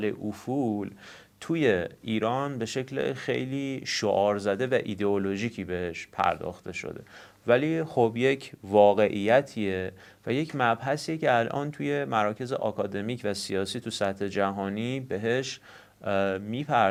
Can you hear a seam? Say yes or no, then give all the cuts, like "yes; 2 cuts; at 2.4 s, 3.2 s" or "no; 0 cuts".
no; 0 cuts